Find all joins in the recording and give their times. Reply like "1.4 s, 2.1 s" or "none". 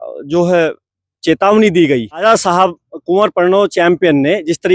2.2 s